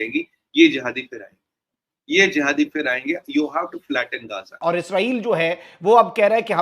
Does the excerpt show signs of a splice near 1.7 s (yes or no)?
no